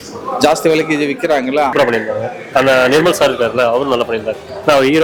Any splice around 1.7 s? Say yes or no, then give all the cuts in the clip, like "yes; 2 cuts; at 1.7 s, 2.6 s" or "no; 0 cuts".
yes; 1 cut; at 1.7 s